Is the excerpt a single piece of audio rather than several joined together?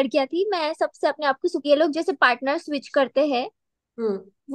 no; 1 cut; at 1.6 s

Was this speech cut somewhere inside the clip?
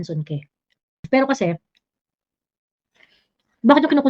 yes; 1 cut; at 1.1 s

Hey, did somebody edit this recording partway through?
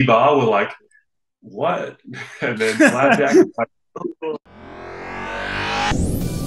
yes; 1 cut; at 4.5 s

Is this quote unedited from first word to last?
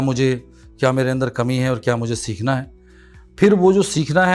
yes; 0 cuts

